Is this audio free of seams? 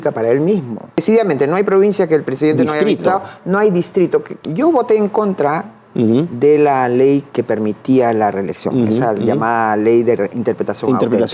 no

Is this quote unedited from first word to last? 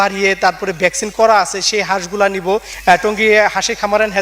no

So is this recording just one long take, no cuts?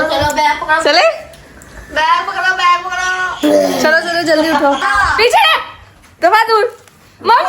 no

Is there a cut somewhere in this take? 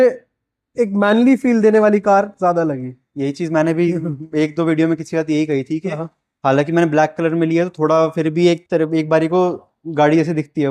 no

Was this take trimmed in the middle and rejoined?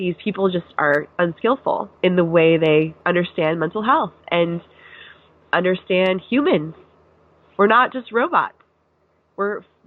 yes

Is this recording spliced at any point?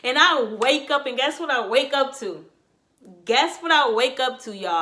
no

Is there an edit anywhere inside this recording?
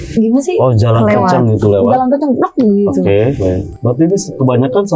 no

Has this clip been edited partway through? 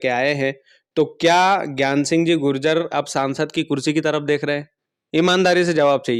no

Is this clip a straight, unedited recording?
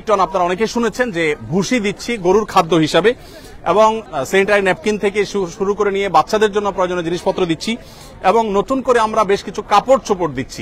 yes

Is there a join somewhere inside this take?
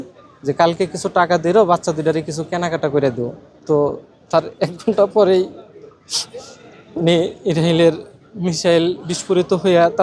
no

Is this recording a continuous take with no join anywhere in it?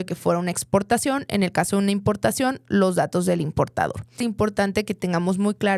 no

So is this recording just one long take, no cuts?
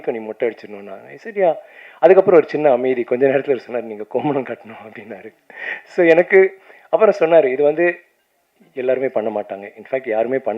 yes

